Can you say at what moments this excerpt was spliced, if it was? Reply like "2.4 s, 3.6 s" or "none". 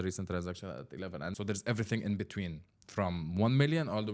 1.3 s